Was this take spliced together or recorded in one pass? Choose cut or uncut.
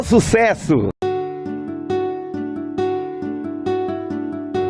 uncut